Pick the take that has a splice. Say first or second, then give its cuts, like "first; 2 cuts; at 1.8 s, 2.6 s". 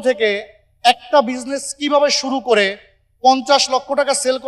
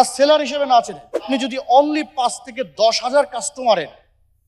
second; 1 cut; at 1.3 s